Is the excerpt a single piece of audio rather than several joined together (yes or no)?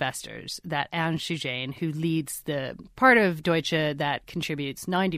yes